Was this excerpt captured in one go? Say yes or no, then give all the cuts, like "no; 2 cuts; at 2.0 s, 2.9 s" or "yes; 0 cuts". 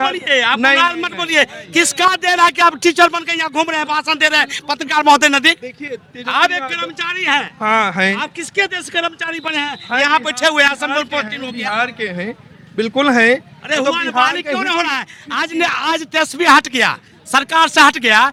yes; 0 cuts